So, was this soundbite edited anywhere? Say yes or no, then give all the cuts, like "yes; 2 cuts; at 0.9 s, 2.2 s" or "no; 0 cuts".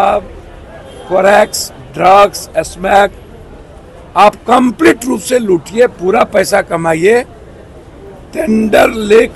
no; 0 cuts